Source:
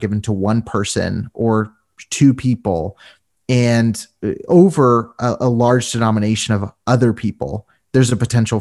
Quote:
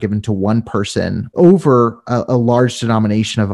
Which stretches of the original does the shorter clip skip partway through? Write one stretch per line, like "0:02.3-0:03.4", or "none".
0:01.3-0:04.4